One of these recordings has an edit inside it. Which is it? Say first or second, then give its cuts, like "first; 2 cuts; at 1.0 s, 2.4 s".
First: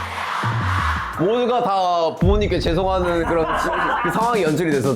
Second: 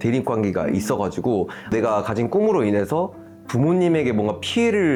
first; 1 cut; at 4.1 s